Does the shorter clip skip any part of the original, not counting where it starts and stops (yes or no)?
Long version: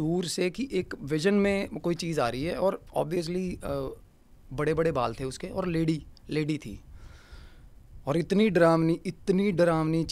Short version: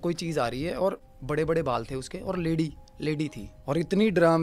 yes